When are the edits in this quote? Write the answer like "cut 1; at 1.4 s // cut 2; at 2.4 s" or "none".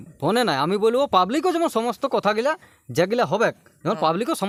none